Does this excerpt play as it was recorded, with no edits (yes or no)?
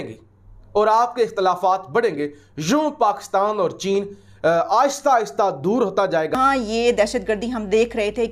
no